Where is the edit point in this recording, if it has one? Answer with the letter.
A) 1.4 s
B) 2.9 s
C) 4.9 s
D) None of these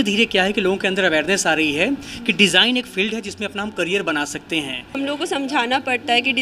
C